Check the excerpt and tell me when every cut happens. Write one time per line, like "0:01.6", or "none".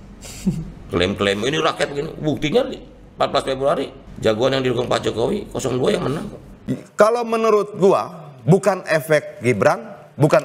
none